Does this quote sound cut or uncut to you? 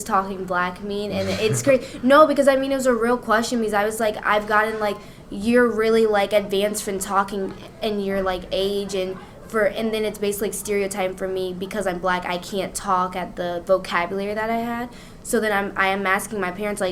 uncut